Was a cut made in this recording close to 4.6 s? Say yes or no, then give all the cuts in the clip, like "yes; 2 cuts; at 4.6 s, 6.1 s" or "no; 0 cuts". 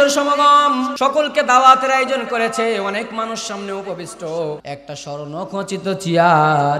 yes; 2 cuts; at 0.9 s, 4.6 s